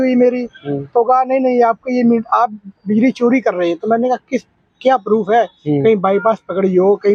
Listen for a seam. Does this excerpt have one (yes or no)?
no